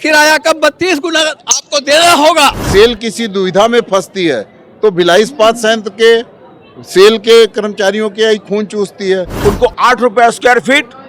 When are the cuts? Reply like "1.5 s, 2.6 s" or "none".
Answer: 2.6 s, 9.3 s